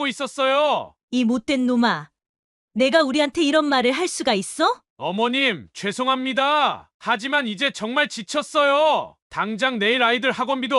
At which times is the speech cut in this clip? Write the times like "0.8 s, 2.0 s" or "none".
1.0 s

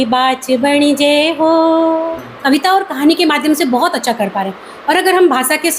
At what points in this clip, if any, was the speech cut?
2.3 s

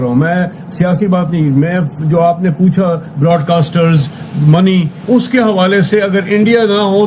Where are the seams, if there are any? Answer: none

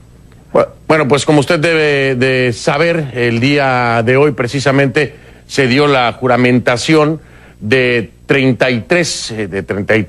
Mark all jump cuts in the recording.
2.1 s

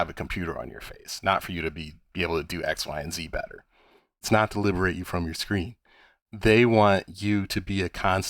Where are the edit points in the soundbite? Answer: 4.2 s

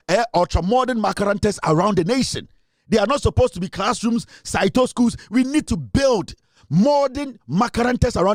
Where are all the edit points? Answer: none

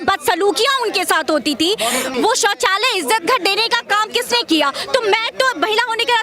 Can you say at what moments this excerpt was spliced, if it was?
2.1 s

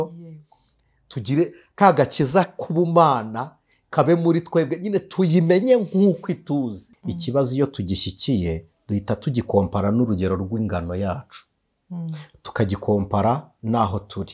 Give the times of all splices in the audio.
6.9 s

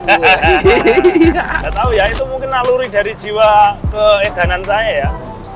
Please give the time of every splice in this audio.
1.6 s

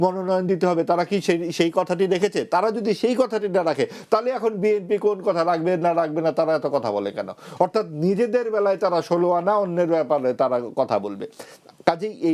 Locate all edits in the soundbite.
none

